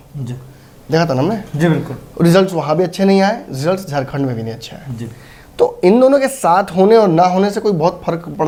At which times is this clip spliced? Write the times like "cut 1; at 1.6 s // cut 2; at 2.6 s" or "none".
none